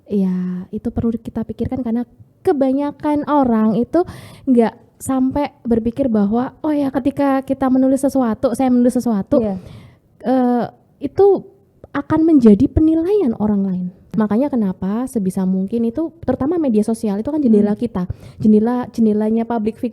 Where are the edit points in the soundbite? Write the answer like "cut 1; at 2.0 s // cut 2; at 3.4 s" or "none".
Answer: cut 1; at 14.1 s